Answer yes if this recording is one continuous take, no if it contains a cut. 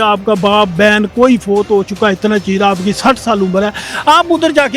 yes